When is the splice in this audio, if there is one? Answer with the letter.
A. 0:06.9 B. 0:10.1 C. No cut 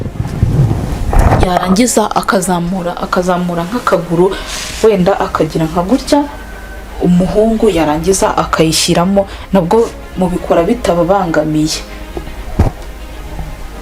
C